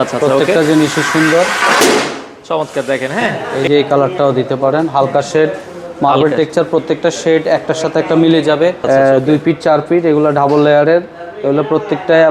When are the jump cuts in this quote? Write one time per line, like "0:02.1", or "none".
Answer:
0:03.5
0:08.8